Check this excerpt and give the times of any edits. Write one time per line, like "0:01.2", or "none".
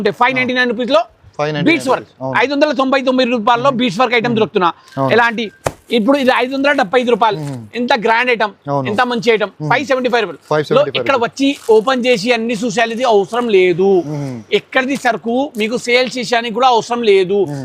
none